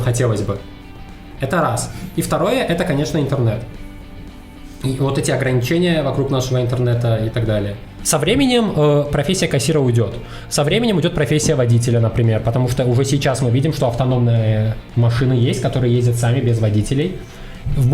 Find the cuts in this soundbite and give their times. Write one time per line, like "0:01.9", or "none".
0:08.0